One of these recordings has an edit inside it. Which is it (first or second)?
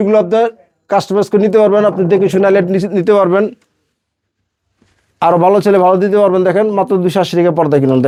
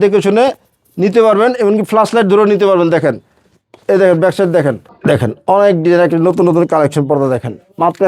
second